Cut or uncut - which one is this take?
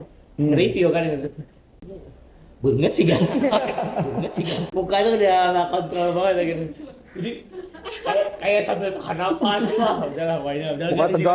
uncut